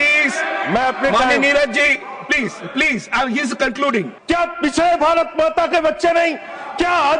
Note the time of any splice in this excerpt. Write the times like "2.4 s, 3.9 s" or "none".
4.2 s